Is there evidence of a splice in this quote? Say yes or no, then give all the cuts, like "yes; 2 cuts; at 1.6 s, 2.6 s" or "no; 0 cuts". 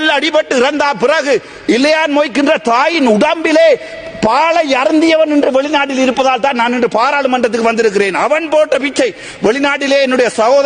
no; 0 cuts